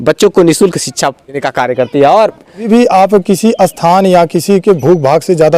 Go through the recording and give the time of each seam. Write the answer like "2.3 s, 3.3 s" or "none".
1.5 s, 2.7 s